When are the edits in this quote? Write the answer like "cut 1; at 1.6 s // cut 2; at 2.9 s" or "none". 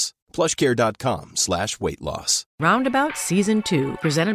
cut 1; at 2.4 s

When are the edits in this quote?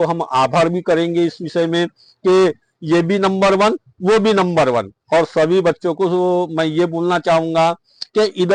none

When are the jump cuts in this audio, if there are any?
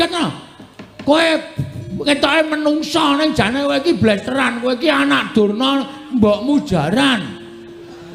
none

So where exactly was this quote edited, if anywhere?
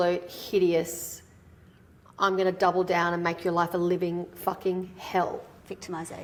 none

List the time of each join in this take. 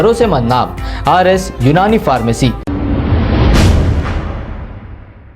cut 1; at 2.7 s

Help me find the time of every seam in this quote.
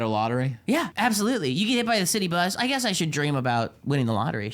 cut 1; at 0.9 s

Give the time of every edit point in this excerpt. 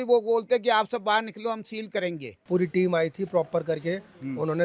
cut 1; at 2.3 s

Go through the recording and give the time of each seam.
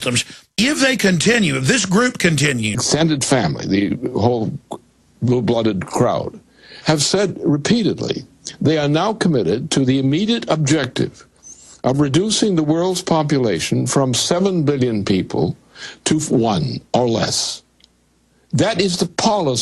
none

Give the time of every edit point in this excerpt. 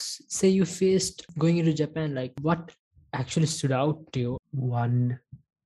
cut 1; at 1.2 s // cut 2; at 2.4 s // cut 3; at 4.4 s

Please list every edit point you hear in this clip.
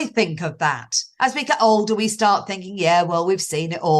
cut 1; at 1.1 s

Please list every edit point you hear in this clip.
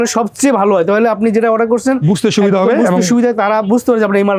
none

